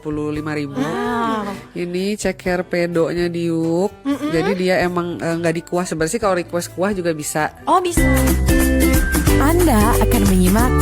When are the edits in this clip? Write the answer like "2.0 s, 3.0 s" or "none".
1.0 s, 7.9 s